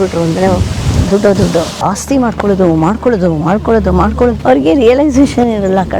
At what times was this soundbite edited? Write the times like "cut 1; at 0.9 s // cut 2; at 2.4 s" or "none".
cut 1; at 1.7 s // cut 2; at 4.4 s